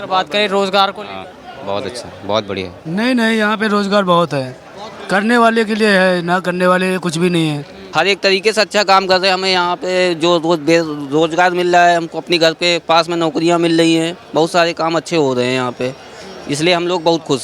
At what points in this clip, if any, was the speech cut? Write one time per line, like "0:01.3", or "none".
0:02.8
0:07.7

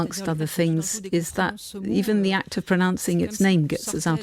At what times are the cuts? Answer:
0:01.8

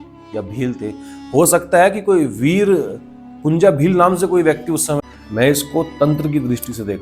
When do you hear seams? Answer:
0:05.0

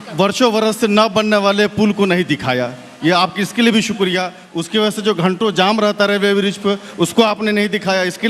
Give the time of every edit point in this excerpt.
none

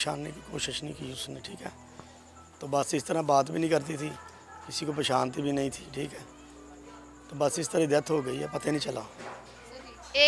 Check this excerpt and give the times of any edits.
none

